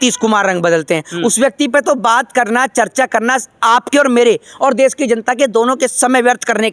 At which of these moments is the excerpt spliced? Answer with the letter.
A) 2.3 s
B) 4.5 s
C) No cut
C